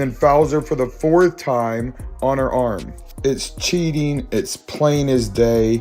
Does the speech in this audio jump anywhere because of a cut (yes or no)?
no